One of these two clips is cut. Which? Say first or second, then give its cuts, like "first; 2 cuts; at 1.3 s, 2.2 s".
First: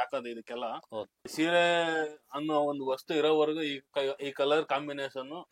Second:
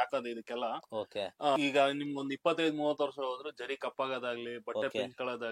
first; 1 cut; at 1.1 s